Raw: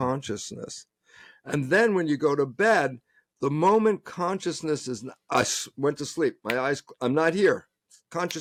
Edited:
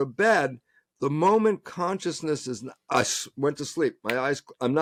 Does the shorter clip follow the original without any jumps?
yes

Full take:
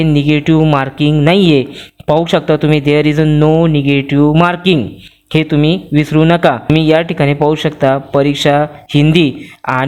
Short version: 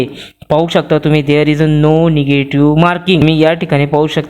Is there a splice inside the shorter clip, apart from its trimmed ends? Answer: yes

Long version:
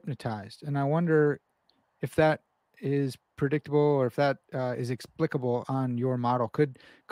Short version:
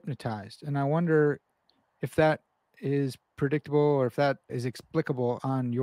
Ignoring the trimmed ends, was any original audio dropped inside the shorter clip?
yes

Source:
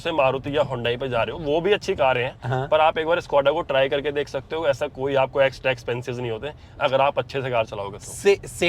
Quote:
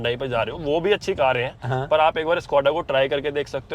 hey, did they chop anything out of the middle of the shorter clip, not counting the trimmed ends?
no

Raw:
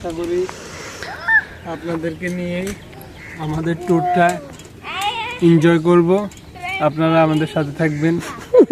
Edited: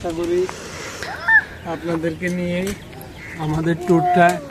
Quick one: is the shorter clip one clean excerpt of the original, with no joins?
yes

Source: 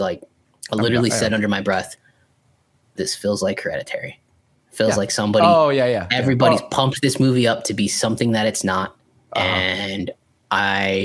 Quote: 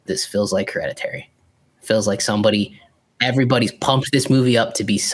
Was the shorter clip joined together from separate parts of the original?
no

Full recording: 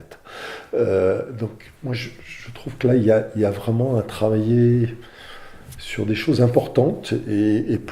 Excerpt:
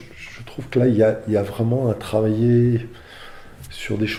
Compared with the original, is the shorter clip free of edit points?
yes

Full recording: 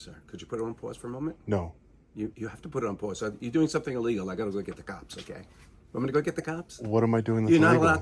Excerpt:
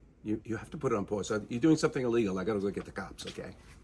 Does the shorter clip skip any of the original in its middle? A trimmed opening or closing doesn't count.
no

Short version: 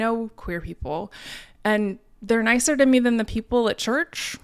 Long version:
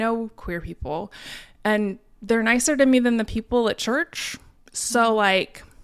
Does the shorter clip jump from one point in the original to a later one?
no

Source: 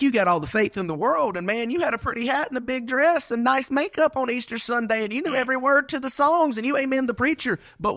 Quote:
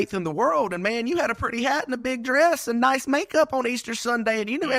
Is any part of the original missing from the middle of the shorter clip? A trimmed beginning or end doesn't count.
no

